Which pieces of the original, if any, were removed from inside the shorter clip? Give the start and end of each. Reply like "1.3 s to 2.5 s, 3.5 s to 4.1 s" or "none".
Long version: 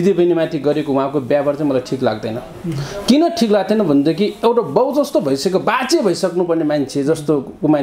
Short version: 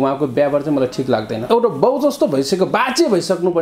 2.4 s to 4.4 s